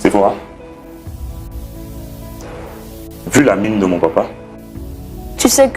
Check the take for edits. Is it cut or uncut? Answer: uncut